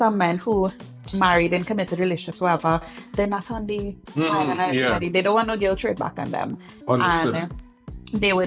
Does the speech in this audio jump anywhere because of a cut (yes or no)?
no